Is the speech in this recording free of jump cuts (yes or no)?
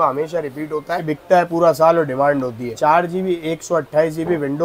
yes